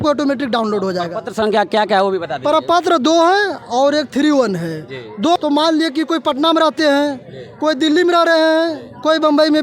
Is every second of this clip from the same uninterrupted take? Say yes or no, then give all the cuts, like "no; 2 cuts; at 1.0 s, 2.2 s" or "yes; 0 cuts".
no; 1 cut; at 5.4 s